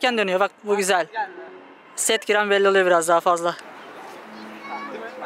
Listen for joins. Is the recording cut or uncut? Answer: cut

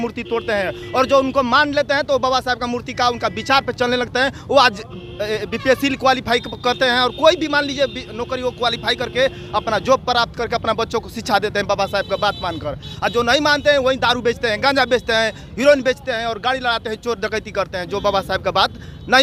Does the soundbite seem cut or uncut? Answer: uncut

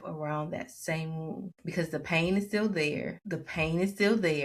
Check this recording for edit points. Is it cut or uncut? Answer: cut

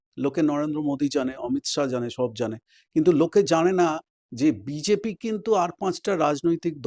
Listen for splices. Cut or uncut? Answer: uncut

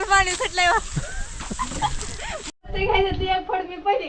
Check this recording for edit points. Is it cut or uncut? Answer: cut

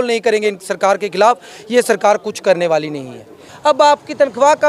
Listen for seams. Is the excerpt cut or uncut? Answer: cut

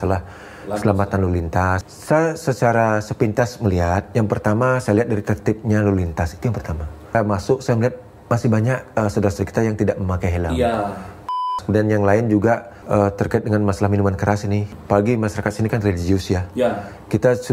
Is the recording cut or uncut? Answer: cut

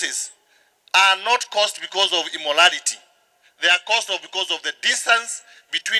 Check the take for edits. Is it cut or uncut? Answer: uncut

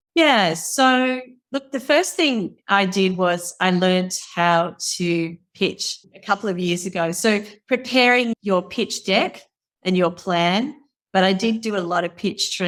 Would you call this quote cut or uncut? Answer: uncut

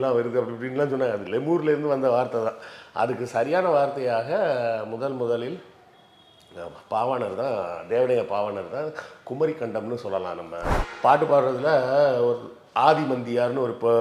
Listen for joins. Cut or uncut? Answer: cut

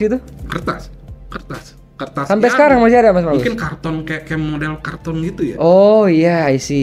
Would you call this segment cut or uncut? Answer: uncut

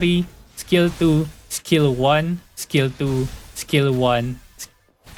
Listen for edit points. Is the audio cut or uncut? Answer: uncut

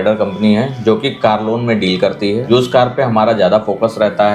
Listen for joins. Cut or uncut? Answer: cut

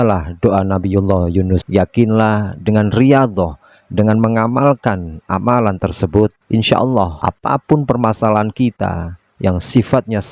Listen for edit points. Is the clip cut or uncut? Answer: cut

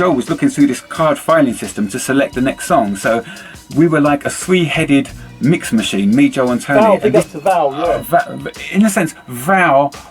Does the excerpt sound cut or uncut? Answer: cut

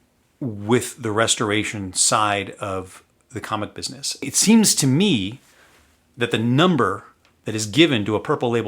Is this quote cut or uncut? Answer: cut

